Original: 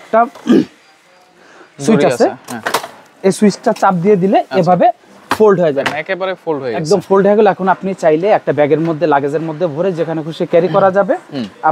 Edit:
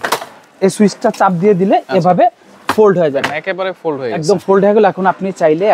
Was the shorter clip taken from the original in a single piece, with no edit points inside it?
yes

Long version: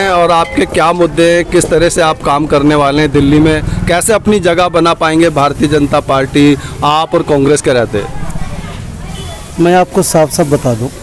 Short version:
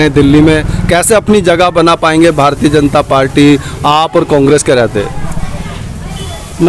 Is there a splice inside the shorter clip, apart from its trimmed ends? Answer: no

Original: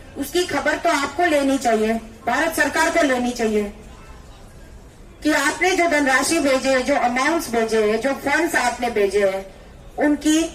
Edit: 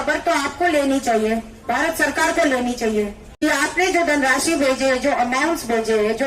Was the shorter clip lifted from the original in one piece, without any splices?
no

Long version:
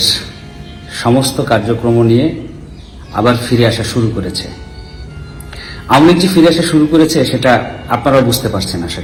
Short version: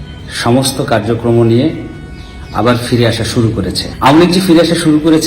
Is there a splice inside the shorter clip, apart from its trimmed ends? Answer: yes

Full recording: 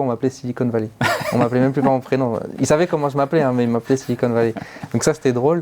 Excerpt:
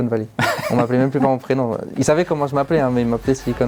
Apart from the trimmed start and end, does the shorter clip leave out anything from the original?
no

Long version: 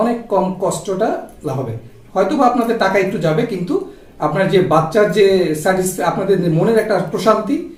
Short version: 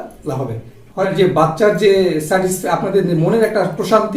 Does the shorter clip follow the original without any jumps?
no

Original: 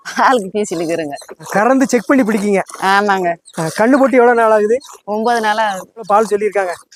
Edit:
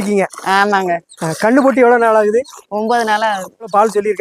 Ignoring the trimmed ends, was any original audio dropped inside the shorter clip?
no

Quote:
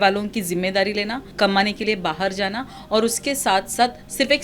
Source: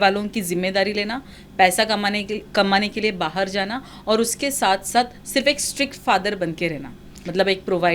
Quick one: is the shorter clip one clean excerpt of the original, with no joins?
no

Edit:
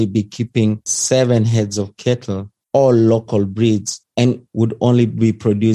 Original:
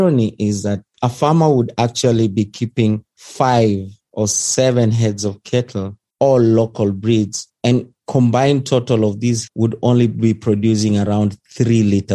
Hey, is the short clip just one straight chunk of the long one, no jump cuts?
no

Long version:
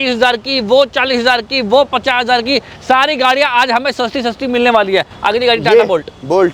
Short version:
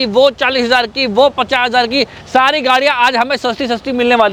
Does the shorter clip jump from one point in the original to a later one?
no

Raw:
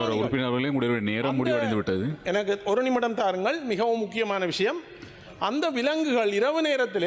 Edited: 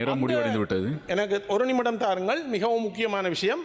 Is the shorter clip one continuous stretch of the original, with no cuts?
yes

